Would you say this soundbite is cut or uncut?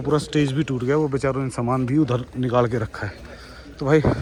uncut